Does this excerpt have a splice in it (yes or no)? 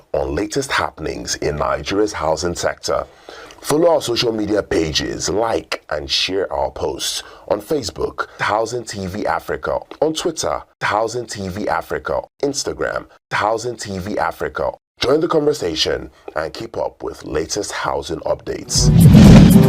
yes